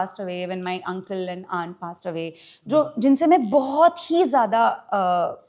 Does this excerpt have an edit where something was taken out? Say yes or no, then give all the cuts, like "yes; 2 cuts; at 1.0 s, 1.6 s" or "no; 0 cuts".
no; 0 cuts